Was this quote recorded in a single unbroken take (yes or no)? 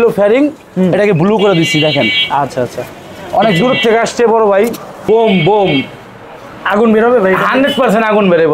no